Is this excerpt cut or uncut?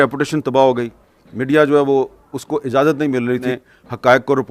cut